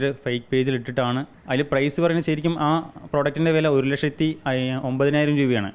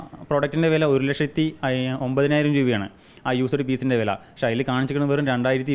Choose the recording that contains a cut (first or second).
first